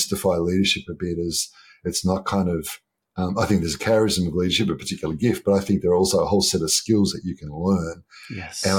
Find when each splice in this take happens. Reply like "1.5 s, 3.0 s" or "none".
none

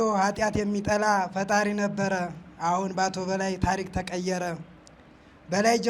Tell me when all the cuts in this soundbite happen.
none

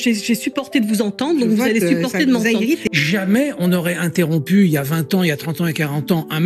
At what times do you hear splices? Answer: 2.8 s

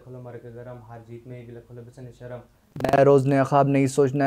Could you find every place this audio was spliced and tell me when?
3.0 s

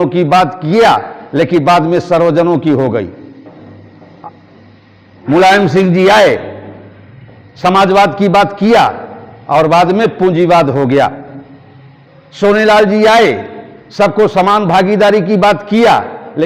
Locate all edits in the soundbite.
none

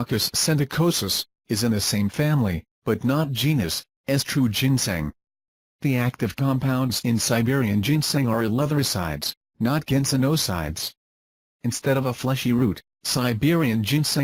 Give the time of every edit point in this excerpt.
none

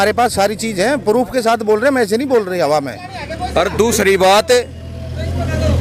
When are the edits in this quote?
none

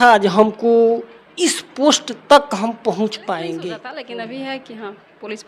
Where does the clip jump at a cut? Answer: 3.9 s

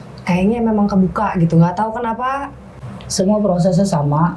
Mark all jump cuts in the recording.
2.6 s

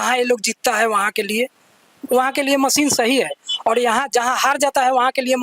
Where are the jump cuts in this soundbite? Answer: none

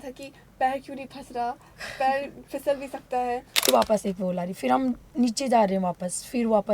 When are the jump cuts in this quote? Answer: 3.7 s

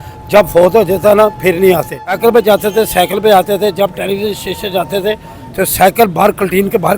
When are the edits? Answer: 2.0 s

